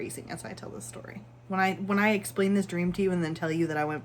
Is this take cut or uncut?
cut